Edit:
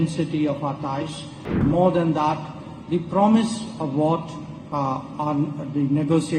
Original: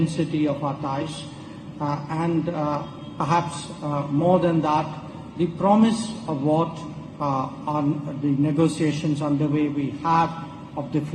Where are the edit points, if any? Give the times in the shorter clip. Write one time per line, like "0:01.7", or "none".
0:01.6